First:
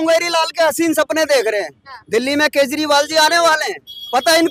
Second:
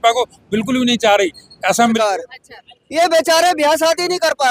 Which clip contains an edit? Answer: second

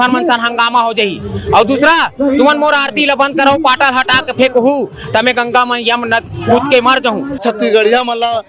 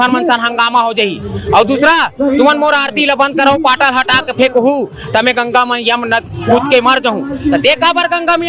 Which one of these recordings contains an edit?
first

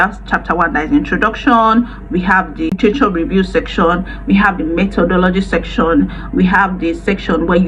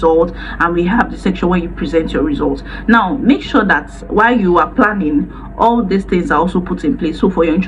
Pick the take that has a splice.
first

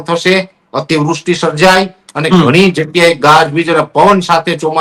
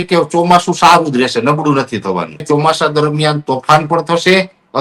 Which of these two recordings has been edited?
second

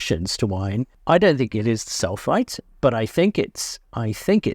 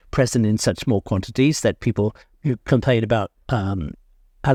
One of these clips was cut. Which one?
first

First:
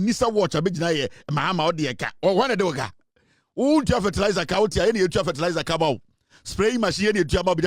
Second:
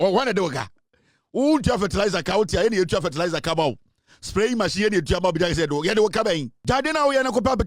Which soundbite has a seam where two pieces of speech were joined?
second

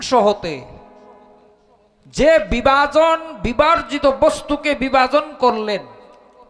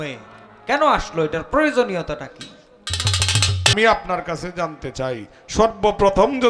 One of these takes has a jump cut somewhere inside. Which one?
second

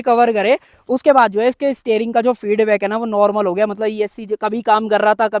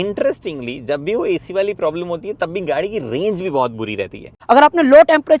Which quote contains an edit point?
second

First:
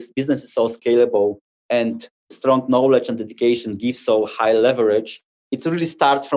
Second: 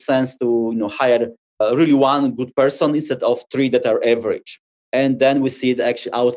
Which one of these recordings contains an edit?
first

